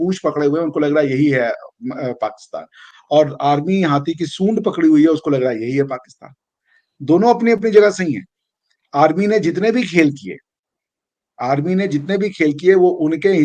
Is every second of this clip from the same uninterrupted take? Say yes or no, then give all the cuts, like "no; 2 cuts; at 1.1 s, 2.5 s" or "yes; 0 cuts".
yes; 0 cuts